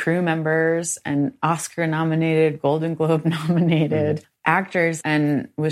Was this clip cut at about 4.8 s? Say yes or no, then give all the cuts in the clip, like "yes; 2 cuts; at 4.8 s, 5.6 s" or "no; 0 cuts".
yes; 1 cut; at 4.8 s